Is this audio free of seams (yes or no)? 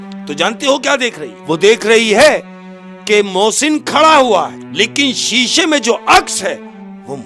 no